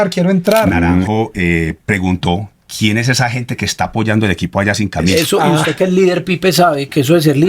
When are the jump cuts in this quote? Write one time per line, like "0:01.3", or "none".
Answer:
0:01.1
0:05.1

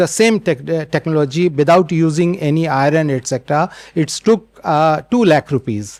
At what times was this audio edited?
none

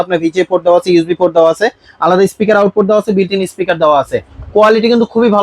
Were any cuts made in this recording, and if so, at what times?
none

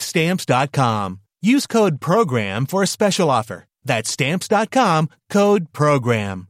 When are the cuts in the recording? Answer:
none

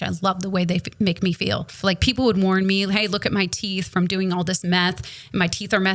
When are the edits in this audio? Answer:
0:01.7

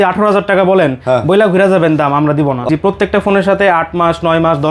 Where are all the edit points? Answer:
0:02.7

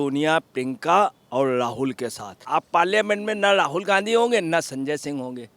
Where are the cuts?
0:02.4

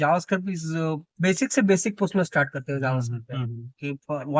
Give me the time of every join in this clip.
none

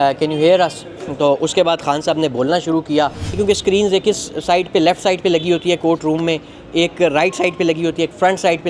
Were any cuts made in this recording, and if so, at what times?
0:03.4

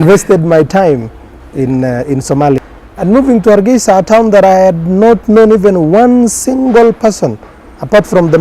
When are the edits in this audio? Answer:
0:02.6

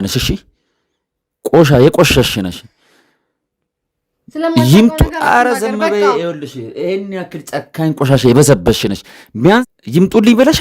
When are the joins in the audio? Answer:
0:09.7

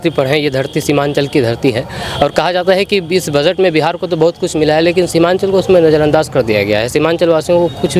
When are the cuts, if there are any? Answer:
none

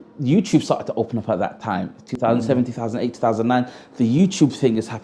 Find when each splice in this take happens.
none

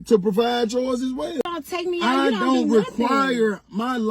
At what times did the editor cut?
0:01.5

